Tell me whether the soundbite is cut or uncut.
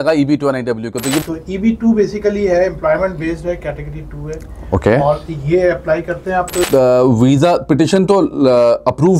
cut